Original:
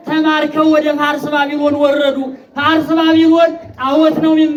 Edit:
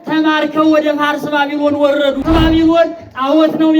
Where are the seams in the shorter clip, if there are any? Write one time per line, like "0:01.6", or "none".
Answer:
0:02.2